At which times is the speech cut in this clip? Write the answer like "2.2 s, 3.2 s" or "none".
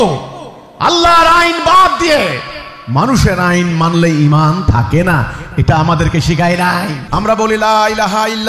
7.0 s